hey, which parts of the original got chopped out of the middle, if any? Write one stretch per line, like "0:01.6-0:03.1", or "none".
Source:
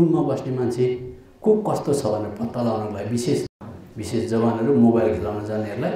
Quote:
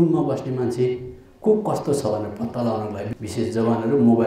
0:03.0-0:03.8